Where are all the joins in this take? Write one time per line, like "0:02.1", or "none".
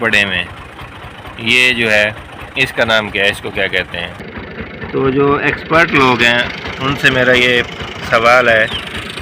0:04.2